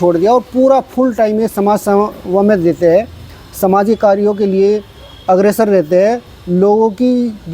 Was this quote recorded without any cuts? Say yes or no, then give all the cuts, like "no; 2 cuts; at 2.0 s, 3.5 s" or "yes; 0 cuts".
yes; 0 cuts